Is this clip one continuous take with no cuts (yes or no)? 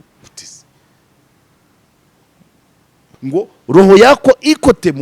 no